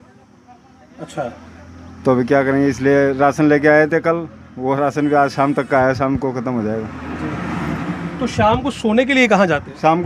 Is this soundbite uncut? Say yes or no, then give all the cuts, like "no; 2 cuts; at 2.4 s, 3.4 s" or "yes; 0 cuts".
yes; 0 cuts